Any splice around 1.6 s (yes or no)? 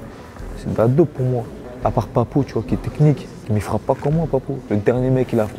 yes